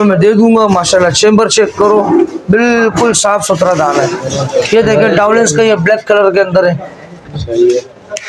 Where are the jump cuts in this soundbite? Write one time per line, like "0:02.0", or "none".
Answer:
0:04.7